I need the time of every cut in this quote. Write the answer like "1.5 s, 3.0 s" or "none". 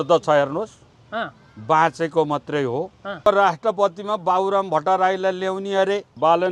3.3 s